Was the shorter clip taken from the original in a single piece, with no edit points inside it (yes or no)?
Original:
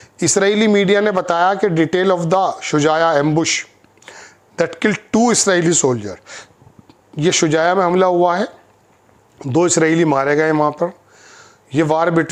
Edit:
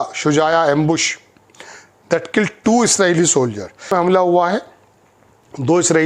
no